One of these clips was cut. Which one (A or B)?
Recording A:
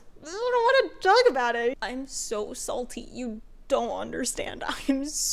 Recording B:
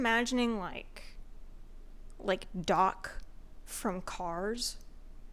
A